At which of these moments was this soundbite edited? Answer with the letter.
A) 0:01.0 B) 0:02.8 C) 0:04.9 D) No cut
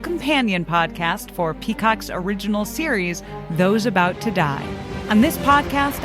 C